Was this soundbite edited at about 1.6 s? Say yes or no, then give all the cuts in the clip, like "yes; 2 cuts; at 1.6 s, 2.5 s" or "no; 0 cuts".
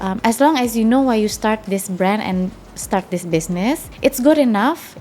no; 1 cut; at 3.9 s